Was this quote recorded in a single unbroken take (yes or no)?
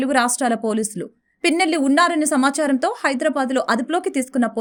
yes